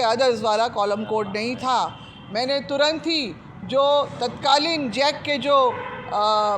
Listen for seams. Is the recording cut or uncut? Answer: uncut